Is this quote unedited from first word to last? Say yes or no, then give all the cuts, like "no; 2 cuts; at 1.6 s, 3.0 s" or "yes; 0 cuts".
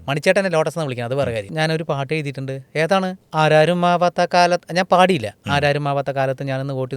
no; 2 cuts; at 1.5 s, 3.2 s